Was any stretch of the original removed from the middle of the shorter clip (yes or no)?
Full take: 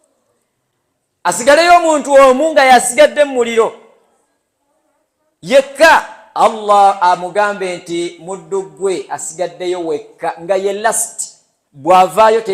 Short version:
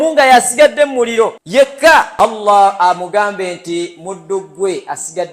yes